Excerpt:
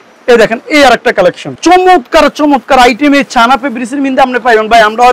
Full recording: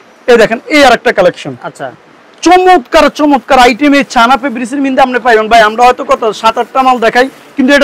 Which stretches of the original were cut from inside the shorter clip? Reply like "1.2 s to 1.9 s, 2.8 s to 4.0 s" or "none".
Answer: 1.5 s to 2.3 s